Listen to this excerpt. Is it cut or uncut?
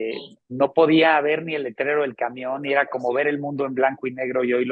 uncut